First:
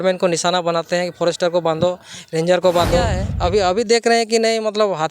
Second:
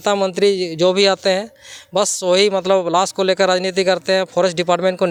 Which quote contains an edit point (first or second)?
first